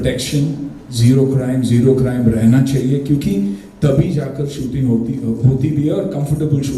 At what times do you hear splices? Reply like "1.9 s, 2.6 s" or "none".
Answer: none